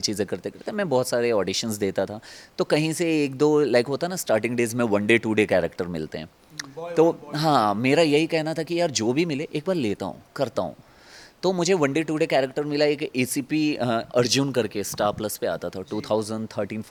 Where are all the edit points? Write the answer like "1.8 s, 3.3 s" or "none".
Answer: none